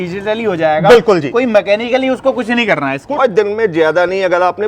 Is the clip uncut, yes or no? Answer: no